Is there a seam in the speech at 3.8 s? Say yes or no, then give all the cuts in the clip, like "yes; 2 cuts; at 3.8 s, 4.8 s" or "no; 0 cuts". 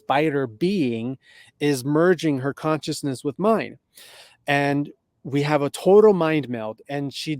no; 0 cuts